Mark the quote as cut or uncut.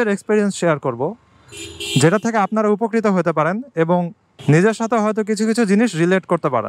uncut